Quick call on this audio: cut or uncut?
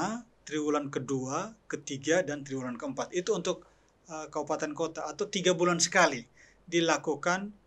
uncut